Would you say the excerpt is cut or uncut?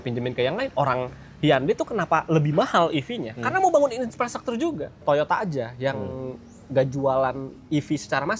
uncut